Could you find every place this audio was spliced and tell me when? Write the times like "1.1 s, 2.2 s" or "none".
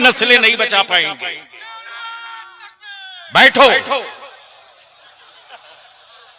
none